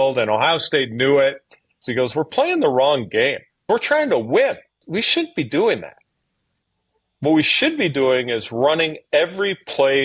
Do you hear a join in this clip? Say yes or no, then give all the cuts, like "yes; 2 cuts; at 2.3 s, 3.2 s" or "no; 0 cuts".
yes; 3 cuts; at 1.8 s, 3.6 s, 4.8 s